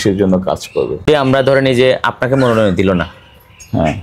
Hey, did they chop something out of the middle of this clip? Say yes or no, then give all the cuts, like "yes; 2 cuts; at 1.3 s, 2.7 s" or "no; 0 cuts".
yes; 1 cut; at 1.0 s